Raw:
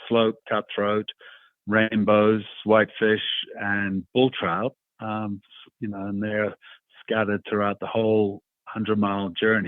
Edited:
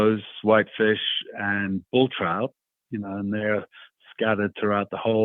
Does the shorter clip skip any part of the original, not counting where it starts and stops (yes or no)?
yes